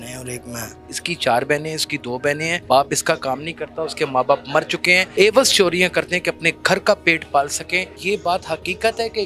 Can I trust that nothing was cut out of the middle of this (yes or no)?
no